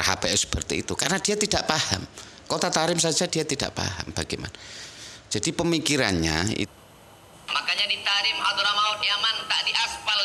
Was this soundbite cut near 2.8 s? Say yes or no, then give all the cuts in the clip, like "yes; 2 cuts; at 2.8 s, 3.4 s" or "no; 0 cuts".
no; 1 cut; at 6.7 s